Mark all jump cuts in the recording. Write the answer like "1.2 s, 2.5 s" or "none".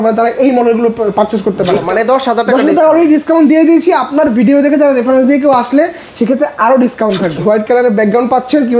1.9 s, 7.3 s